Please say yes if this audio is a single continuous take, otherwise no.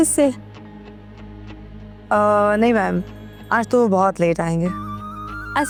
yes